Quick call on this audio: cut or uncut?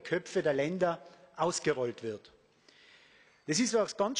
uncut